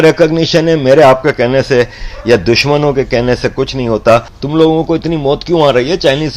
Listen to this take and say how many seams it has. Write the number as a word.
one